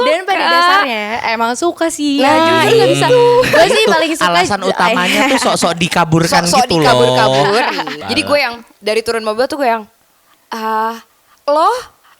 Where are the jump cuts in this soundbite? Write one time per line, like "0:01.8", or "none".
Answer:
0:07.9